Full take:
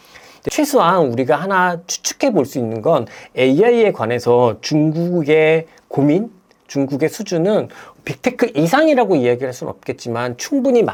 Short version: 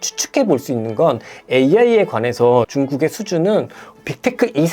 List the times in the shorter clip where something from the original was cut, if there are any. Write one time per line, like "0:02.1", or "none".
0:02.7